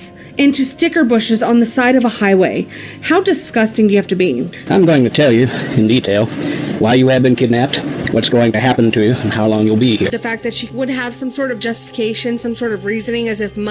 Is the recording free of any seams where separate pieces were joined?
yes; 0 cuts

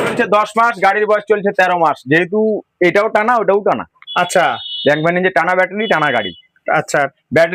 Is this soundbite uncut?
yes; 0 cuts

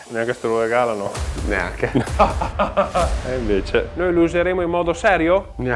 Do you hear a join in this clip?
yes; 1 cut; at 3.9 s

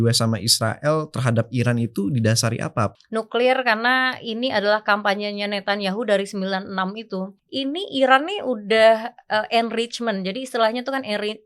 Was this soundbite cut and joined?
yes; 2 cuts; at 2.9 s, 7.3 s

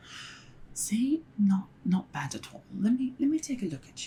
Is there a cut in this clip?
no; 0 cuts

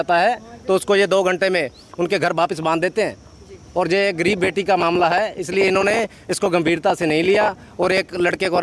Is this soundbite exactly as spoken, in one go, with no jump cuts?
yes; 0 cuts

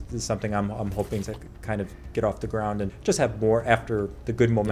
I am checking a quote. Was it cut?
yes; 2 cuts; at 1.3 s, 2.9 s

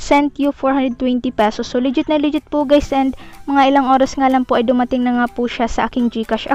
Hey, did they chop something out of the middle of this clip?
no; 0 cuts

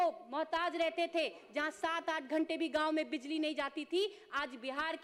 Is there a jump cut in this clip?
no; 0 cuts

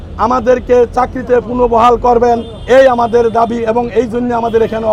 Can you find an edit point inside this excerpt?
no; 0 cuts

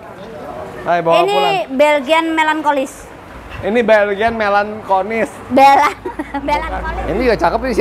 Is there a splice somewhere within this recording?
yes; 1 cut; at 6.8 s

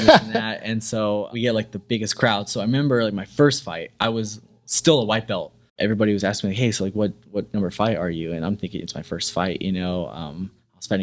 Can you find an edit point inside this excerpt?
yes; 2 cuts; at 1.3 s, 5.7 s

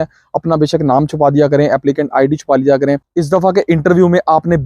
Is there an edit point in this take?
yes; 1 cut; at 3.0 s

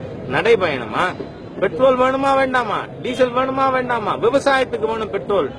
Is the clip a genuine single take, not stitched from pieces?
yes; 0 cuts

